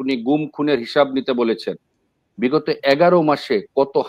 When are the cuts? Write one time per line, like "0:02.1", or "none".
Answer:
none